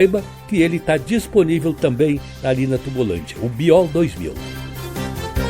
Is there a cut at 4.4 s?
yes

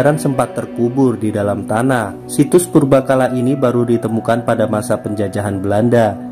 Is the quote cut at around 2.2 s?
yes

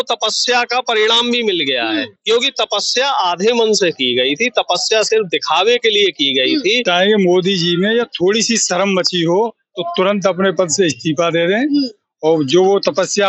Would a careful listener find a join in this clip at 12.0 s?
no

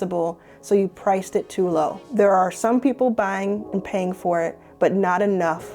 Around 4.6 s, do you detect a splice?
no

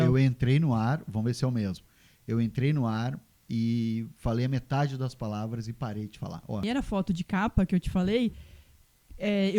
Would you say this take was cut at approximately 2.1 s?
no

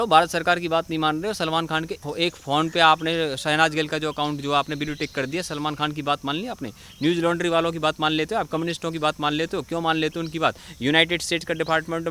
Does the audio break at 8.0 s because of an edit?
no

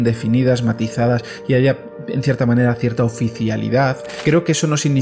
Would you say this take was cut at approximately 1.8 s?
no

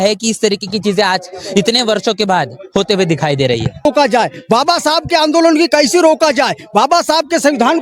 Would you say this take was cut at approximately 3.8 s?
yes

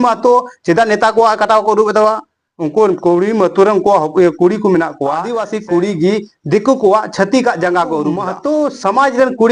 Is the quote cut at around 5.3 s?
yes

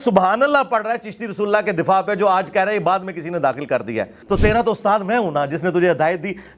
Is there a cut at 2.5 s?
no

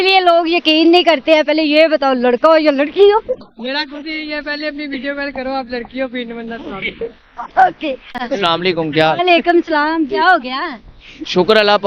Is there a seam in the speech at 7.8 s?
no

